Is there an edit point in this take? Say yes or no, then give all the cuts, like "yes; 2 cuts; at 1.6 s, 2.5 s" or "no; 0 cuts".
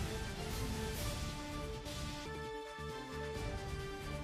no; 0 cuts